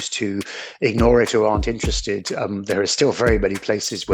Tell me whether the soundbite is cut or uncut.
uncut